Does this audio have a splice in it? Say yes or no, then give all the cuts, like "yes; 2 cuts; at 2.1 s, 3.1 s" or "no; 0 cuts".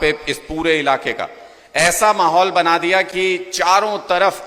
no; 0 cuts